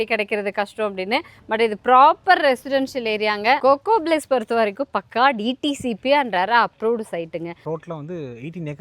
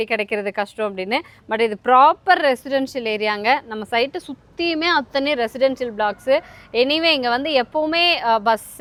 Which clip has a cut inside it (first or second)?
first